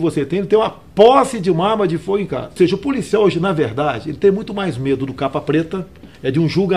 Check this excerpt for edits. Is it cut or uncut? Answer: cut